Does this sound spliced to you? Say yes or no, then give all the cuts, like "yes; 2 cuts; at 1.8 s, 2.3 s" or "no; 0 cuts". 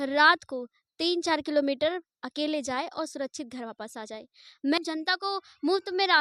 yes; 1 cut; at 4.8 s